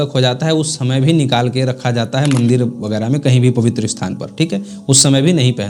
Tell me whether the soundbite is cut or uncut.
uncut